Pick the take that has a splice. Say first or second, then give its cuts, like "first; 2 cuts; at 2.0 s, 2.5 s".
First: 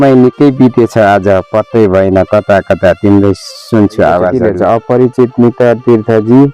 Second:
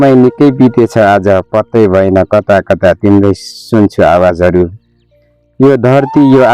first; 1 cut; at 4.4 s